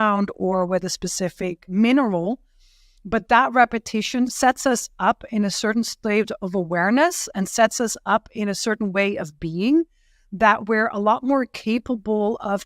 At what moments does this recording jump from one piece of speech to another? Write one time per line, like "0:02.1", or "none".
0:01.6
0:04.3